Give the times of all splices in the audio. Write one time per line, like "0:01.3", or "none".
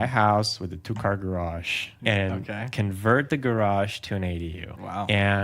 0:02.0